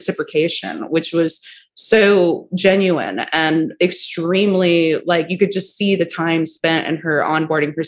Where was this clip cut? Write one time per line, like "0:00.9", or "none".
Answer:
none